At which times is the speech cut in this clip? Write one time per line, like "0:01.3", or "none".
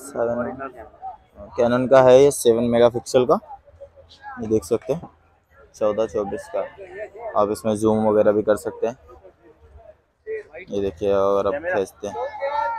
none